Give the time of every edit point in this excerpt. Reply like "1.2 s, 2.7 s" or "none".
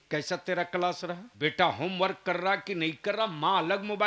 1.3 s